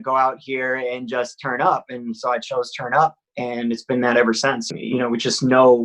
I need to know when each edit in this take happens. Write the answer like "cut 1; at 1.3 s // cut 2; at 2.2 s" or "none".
cut 1; at 4.7 s